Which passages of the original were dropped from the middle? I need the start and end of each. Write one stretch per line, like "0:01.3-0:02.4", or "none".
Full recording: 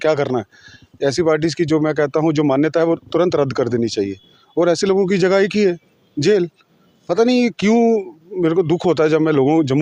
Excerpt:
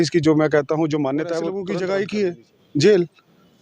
0:03.1-0:05.1